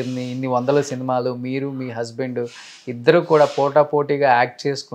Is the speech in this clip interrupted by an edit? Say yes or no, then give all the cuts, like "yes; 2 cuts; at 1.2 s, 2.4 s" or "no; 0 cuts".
no; 0 cuts